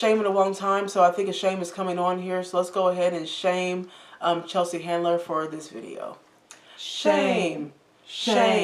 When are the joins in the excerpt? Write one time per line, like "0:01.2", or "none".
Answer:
none